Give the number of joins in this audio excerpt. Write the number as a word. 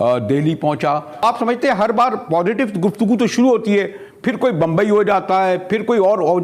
one